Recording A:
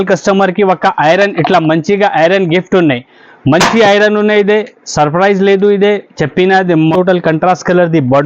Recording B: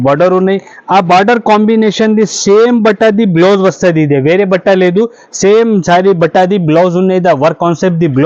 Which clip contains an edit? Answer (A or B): A